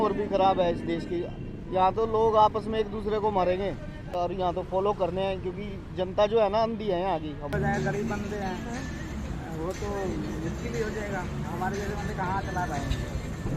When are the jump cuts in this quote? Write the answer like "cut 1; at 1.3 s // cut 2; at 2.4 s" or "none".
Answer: cut 1; at 4.1 s // cut 2; at 7.4 s